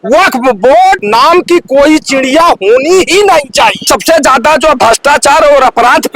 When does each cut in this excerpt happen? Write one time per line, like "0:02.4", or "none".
0:01.0
0:03.9